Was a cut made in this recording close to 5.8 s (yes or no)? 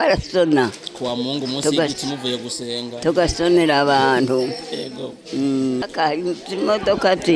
yes